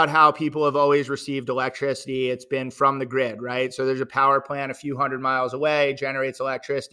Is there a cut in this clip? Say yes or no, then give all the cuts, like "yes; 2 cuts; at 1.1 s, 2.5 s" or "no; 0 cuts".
no; 0 cuts